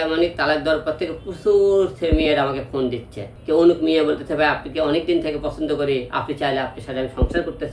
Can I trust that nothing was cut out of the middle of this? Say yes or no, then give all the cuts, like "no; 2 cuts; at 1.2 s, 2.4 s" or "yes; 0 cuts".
no; 1 cut; at 3.3 s